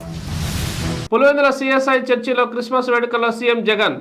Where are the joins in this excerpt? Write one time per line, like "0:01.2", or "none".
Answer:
0:01.0

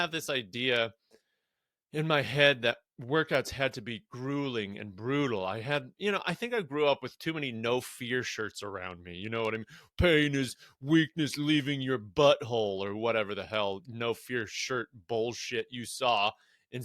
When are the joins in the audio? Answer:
none

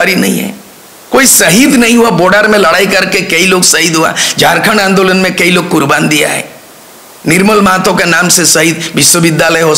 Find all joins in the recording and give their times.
none

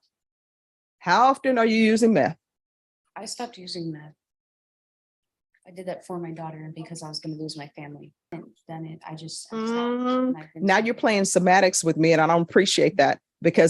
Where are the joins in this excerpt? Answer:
0:08.3

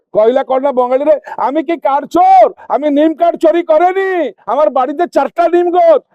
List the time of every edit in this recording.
none

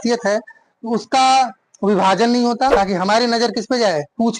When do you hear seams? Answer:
0:02.7

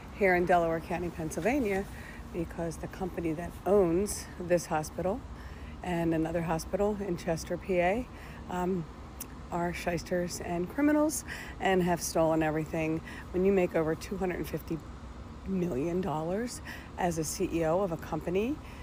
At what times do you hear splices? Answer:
none

